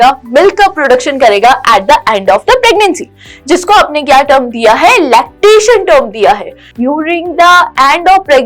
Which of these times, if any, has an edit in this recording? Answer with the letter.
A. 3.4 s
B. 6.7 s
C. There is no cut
B